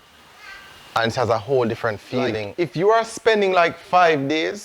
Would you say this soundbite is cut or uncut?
cut